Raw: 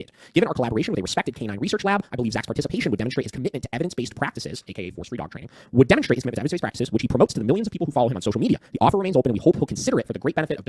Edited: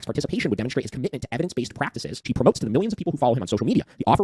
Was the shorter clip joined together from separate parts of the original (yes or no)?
yes